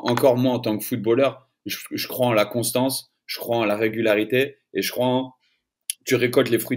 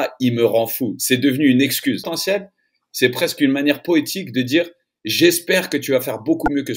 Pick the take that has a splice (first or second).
second